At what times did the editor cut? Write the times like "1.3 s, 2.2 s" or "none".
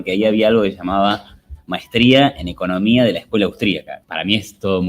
3.9 s